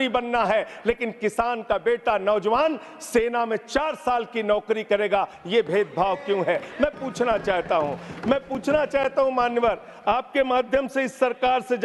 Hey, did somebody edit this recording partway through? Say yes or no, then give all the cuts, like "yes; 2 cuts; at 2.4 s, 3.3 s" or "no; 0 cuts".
no; 0 cuts